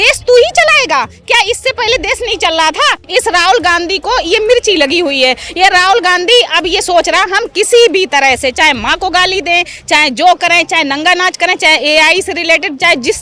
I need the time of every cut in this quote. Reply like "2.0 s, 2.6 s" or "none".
3.0 s

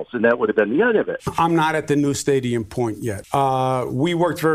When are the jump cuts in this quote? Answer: 1.2 s, 3.1 s

